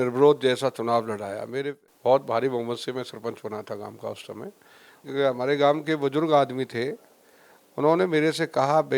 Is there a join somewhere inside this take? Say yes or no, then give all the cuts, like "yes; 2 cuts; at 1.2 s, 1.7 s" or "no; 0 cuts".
yes; 2 cuts; at 1.7 s, 5.0 s